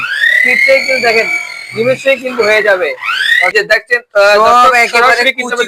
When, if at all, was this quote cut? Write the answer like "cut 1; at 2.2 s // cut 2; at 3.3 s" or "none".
cut 1; at 3.5 s